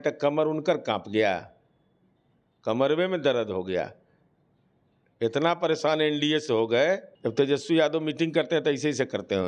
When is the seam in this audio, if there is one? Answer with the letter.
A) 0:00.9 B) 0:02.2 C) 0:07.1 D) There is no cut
C